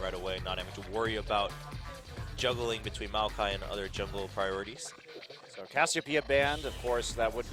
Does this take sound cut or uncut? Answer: uncut